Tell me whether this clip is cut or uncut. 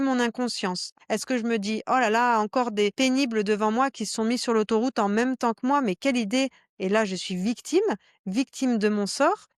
cut